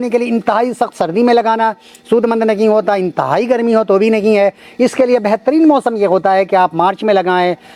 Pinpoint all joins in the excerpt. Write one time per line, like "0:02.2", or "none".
none